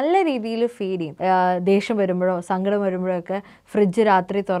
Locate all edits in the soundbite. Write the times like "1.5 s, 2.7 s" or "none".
1.1 s